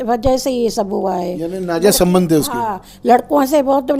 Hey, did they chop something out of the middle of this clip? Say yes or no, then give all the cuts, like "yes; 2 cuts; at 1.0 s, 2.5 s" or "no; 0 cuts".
no; 0 cuts